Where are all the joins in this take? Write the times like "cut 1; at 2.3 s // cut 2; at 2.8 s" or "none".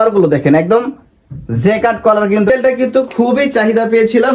cut 1; at 2.5 s

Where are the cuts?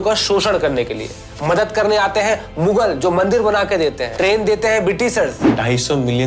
cut 1; at 4.1 s // cut 2; at 5.5 s

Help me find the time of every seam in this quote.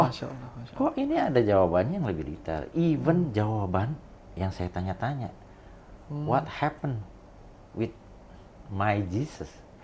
none

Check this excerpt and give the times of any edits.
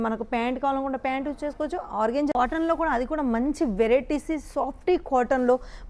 cut 1; at 2.3 s

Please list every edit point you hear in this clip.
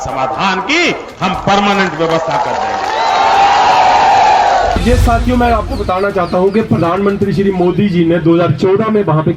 cut 1; at 4.8 s

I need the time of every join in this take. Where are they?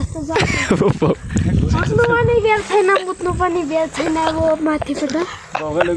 none

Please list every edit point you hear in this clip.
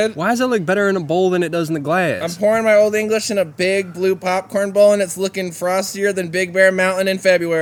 none

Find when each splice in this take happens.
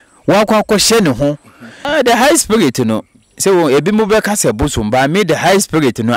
cut 1; at 1.7 s

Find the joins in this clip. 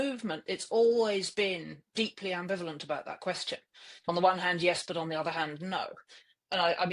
cut 1; at 4.1 s

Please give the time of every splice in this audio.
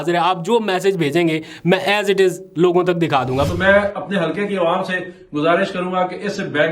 cut 1; at 3.5 s

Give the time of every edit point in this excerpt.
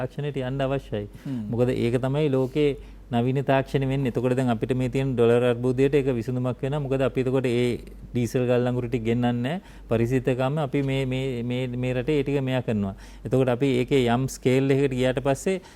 none

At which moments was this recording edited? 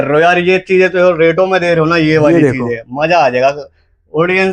none

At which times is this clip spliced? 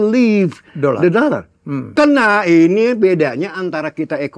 cut 1; at 1.9 s

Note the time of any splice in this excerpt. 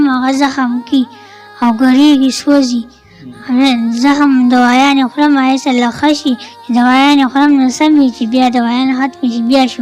none

